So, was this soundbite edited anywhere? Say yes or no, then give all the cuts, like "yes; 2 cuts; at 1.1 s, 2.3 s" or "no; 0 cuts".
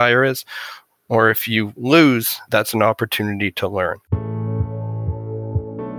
yes; 2 cuts; at 2.4 s, 4.1 s